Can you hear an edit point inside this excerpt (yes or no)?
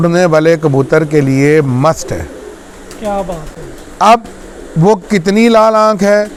no